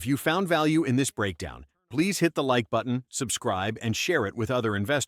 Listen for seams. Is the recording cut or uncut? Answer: uncut